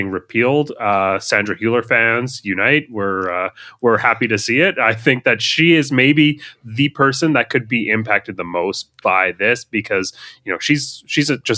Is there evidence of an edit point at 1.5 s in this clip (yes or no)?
no